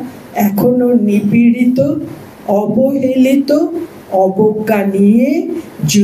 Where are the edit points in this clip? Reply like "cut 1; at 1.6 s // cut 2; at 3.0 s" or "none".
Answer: none